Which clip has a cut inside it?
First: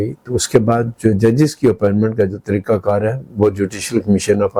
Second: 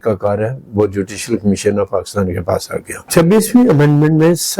second; 1 cut; at 3.1 s

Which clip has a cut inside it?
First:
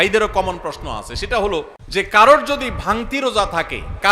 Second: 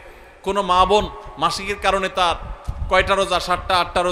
first; 1 cut; at 1.8 s

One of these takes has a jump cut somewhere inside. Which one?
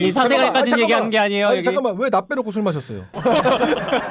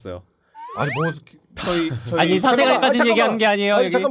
first; 1 cut; at 3.2 s

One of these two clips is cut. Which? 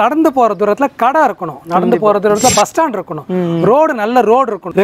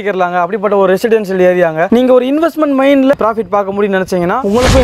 second; 1 cut; at 3.1 s

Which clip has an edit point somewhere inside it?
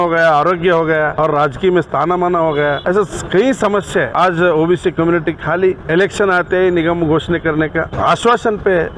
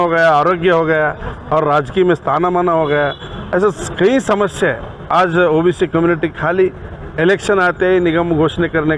first; 5 cuts; at 1.1 s, 2.8 s, 4.1 s, 5.8 s, 7.9 s

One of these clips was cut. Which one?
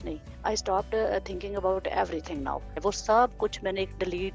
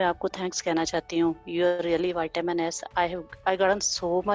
first; 1 cut; at 2.8 s

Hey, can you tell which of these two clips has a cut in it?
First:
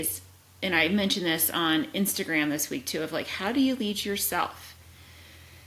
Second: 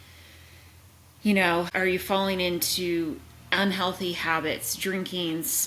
second; 1 cut; at 1.7 s

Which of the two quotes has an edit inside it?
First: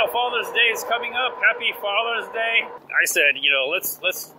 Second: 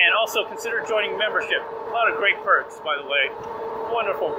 first; 1 cut; at 2.8 s

